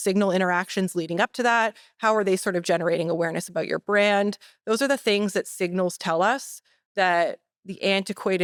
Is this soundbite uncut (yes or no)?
yes